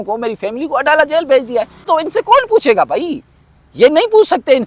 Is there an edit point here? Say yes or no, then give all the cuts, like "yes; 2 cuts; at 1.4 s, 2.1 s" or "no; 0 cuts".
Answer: yes; 1 cut; at 1.8 s